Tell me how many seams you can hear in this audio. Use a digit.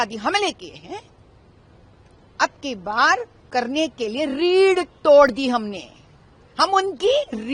0